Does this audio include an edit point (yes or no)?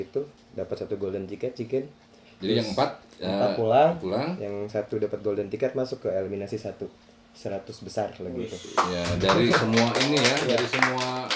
no